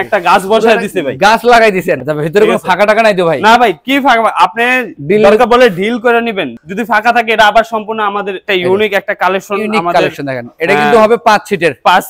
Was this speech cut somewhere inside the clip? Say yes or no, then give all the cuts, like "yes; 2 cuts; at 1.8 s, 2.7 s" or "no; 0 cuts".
yes; 4 cuts; at 2.0 s, 4.9 s, 6.5 s, 8.4 s